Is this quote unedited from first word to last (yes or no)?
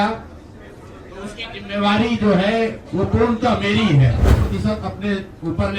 no